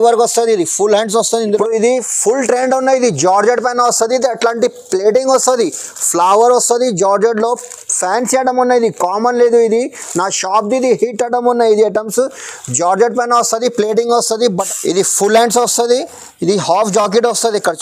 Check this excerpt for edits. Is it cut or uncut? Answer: cut